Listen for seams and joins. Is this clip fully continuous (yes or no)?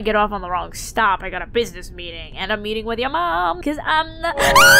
no